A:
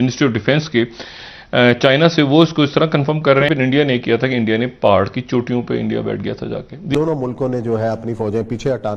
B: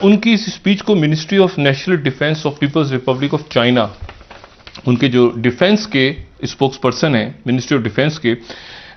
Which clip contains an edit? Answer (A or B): A